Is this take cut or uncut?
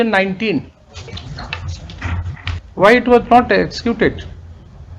cut